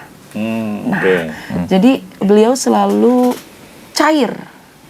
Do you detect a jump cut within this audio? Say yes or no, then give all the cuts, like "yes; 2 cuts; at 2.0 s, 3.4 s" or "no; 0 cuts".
no; 0 cuts